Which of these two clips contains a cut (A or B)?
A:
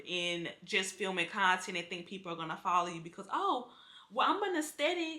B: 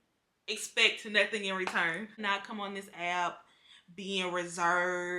B